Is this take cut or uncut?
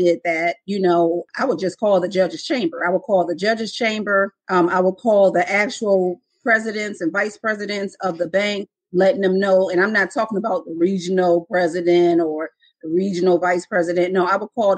cut